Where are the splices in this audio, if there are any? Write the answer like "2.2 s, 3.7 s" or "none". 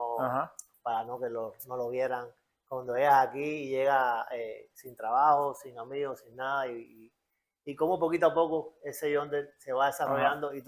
none